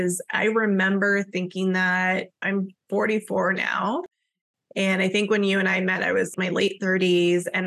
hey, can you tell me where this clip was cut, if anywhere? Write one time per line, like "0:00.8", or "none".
0:02.4
0:06.3